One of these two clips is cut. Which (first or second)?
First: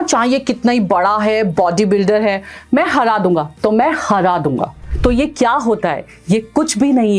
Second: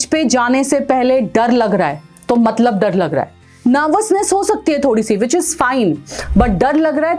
first